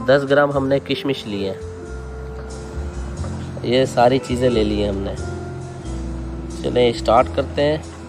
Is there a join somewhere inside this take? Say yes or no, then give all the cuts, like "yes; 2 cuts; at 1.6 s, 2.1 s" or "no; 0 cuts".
yes; 2 cuts; at 5.1 s, 6.6 s